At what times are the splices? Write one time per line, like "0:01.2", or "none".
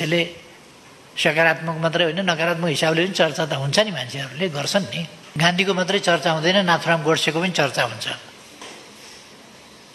0:05.2